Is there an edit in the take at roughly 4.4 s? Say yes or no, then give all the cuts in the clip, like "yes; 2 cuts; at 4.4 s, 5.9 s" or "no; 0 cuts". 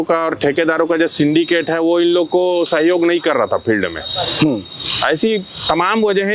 no; 0 cuts